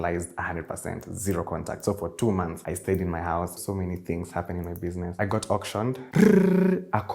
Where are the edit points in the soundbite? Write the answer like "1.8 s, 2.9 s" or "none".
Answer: 2.6 s, 3.6 s, 5.2 s, 6.1 s